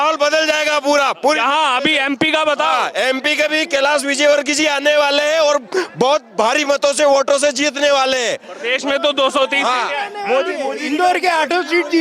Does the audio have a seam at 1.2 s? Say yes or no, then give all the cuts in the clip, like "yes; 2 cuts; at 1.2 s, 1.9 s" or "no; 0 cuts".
no; 0 cuts